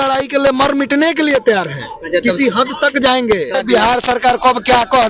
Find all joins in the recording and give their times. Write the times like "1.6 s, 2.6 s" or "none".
3.5 s